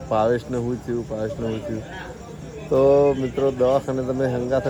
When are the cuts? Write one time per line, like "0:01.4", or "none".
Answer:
none